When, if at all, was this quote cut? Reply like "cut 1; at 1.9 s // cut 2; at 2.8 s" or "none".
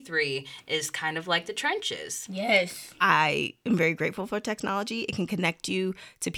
cut 1; at 2.8 s